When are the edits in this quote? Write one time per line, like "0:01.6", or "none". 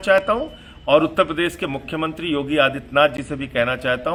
none